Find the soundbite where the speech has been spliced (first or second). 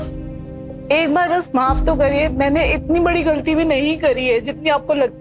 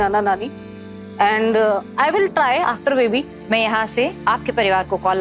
second